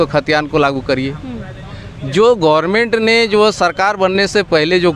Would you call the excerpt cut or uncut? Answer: uncut